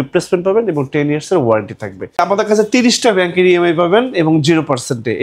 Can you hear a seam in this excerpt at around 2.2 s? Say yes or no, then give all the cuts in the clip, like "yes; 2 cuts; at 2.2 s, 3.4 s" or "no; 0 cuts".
yes; 1 cut; at 2.2 s